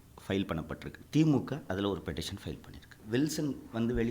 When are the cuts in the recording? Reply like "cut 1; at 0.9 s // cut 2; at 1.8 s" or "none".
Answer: cut 1; at 0.9 s // cut 2; at 2.9 s